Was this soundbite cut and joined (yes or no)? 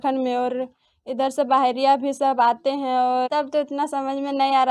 yes